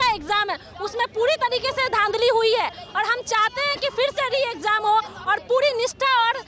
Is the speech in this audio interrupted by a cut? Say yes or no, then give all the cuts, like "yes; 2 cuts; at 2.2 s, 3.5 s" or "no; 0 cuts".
no; 0 cuts